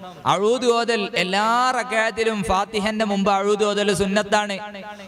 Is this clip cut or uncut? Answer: uncut